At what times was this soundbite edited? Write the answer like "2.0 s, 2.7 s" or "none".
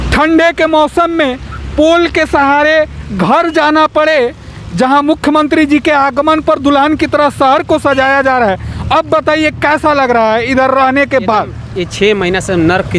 none